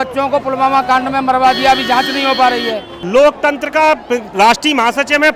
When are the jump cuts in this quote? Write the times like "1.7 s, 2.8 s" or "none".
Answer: 2.9 s